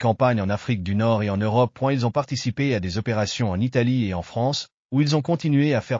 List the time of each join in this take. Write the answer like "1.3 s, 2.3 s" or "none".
none